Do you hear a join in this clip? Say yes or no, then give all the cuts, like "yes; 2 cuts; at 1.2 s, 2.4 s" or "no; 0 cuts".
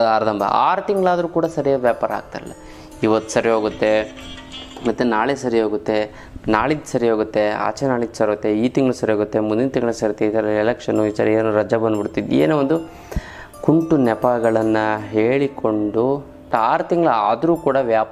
yes; 1 cut; at 16.5 s